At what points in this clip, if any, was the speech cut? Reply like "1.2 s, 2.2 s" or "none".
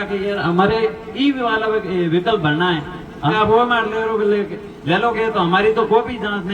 3.3 s